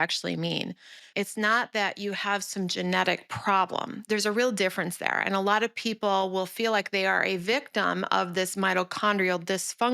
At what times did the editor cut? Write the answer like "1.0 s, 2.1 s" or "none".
1.0 s, 4.0 s